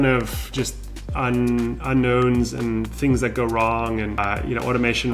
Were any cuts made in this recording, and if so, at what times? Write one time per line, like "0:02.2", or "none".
0:04.2